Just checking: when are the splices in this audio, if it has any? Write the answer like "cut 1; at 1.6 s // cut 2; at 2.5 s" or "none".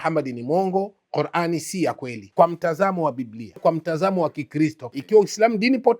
cut 1; at 2.1 s // cut 2; at 3.6 s // cut 3; at 4.9 s